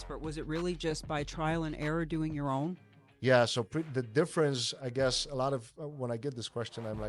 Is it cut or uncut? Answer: uncut